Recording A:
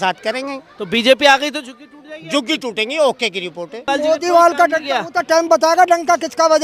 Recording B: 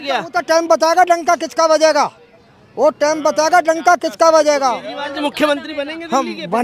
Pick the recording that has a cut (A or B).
A